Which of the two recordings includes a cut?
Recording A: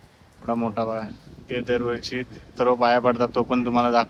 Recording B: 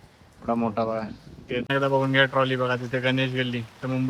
B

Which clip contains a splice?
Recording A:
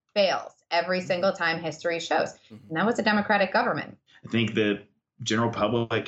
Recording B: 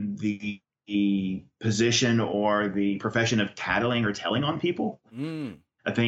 A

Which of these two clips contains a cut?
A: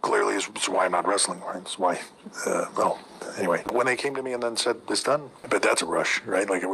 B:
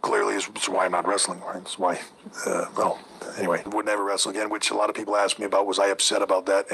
A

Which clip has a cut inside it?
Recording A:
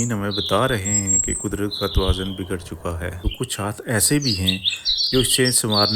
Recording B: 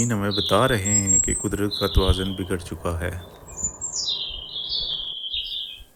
A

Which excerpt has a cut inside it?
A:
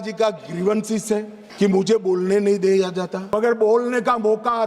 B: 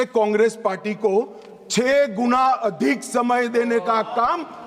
A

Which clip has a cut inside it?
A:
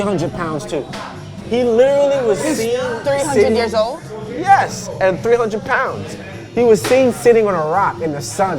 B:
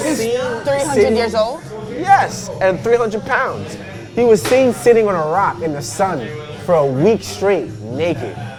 A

